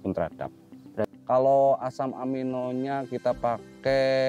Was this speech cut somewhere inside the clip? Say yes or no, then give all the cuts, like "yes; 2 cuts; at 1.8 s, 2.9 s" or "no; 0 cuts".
yes; 1 cut; at 1.1 s